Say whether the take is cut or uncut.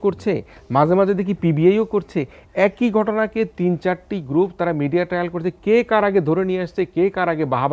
uncut